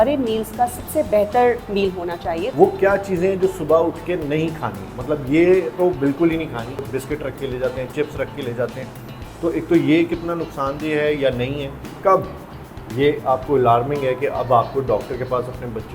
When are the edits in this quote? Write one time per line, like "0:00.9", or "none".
0:02.5
0:06.9
0:11.8